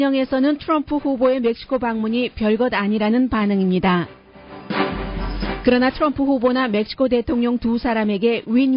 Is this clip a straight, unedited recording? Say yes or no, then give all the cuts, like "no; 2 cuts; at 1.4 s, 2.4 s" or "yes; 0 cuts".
yes; 0 cuts